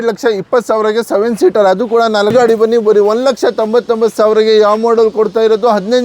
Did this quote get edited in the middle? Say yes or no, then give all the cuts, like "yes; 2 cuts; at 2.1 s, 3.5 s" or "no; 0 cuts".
yes; 1 cut; at 2.3 s